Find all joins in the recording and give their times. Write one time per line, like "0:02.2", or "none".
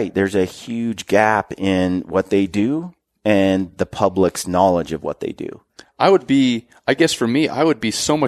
none